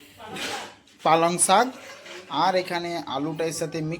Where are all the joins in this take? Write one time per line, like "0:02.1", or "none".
none